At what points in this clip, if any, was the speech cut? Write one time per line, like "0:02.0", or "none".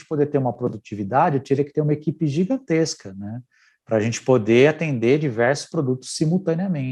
none